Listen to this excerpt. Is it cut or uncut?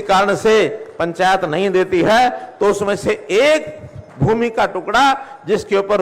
uncut